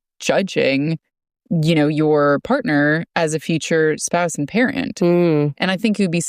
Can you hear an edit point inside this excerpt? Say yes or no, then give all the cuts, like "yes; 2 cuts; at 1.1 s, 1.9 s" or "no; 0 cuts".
no; 0 cuts